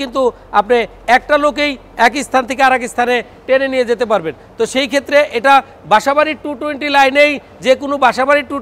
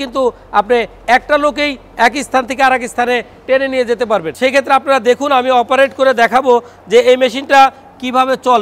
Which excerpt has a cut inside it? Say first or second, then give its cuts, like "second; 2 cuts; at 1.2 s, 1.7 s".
second; 1 cut; at 4.3 s